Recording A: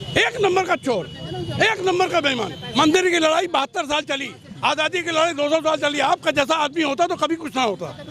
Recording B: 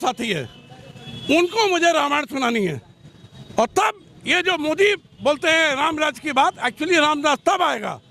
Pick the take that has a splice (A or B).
A